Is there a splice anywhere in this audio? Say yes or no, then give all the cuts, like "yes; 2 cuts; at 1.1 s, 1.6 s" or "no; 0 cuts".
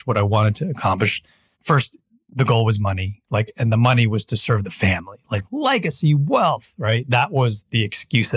yes; 1 cut; at 1.5 s